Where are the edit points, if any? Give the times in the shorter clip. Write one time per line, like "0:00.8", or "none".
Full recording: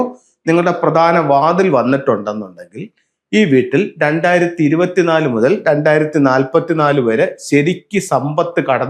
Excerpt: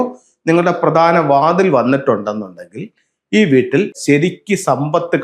0:03.9